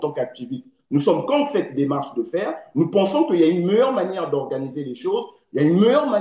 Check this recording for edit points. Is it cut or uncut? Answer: uncut